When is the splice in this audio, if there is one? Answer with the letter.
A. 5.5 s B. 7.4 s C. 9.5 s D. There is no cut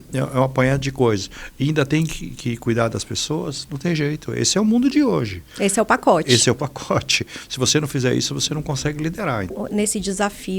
C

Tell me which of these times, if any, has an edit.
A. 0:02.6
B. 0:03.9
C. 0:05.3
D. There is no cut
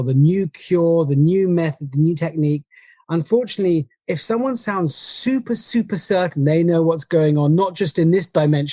B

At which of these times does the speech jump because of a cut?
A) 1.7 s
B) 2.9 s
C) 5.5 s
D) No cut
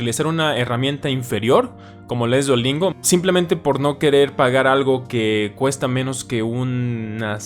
B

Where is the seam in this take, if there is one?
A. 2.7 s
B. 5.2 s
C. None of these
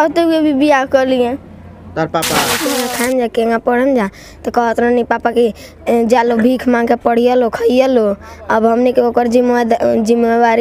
A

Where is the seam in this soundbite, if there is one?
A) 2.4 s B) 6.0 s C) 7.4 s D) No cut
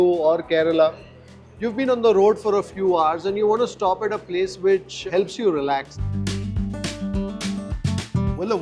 B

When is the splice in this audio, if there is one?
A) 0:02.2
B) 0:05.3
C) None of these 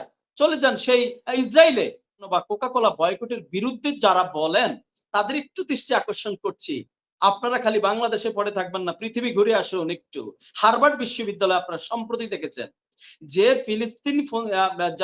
A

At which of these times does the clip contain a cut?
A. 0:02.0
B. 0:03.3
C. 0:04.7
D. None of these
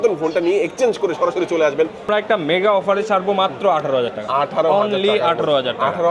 A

